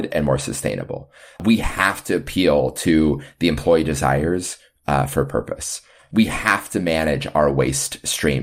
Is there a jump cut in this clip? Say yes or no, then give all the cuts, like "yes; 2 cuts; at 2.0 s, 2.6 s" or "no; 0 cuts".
yes; 2 cuts; at 1.4 s, 6.0 s